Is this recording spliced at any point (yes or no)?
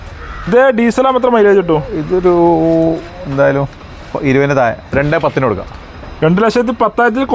yes